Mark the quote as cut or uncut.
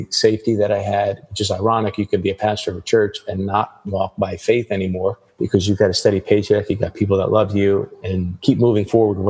cut